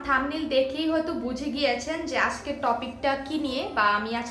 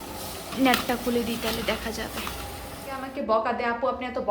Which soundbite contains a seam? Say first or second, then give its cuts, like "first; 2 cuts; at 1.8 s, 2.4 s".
second; 1 cut; at 3.0 s